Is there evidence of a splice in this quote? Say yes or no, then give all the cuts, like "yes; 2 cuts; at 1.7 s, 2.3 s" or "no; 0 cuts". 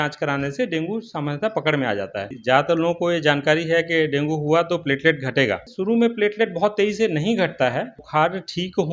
yes; 3 cuts; at 2.4 s, 5.7 s, 8.0 s